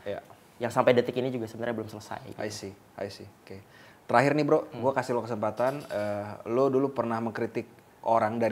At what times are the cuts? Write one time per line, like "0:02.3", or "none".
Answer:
none